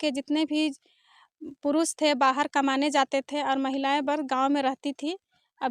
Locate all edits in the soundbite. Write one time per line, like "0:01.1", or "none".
none

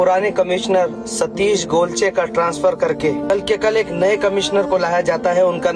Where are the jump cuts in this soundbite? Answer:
none

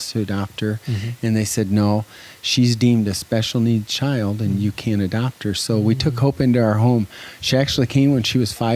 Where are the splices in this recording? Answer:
none

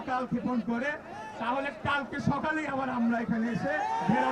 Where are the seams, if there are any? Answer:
none

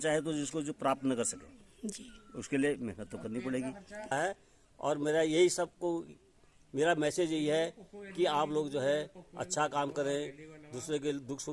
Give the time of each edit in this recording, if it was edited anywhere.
0:04.1

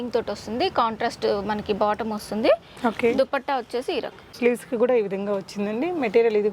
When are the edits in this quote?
0:02.7
0:04.3

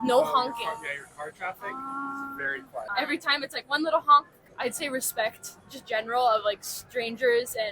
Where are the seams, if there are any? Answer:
0:02.9
0:04.4

